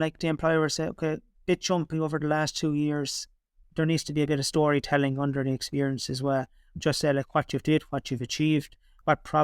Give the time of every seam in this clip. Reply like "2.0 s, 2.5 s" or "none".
3.6 s, 6.6 s

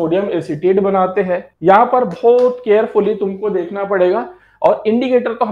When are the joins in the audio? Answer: 1.5 s

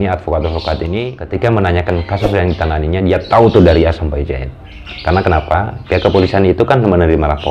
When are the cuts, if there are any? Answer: 1.1 s

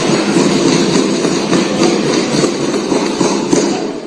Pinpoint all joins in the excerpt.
none

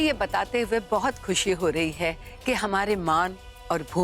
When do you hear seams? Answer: 2.3 s

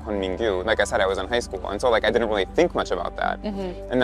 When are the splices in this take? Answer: none

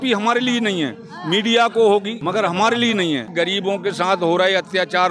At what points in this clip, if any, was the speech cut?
2.2 s, 3.3 s

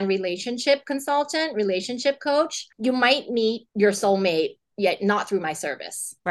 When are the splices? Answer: 2.6 s, 3.7 s

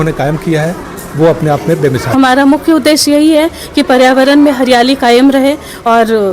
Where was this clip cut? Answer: 2.1 s

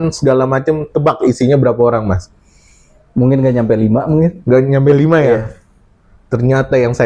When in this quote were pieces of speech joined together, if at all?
none

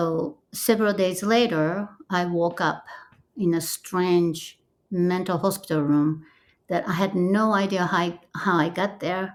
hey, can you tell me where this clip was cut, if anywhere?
none

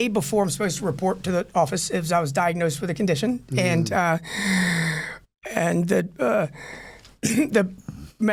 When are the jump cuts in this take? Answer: none

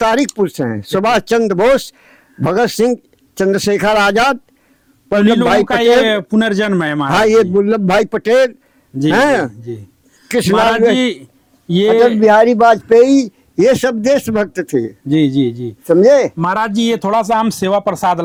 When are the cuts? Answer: none

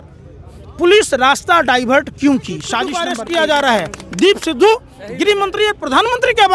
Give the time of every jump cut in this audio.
3.1 s

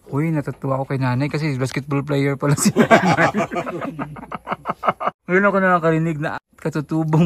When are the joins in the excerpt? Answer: 4.9 s, 6.3 s

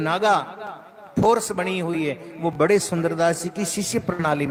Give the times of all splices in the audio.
none

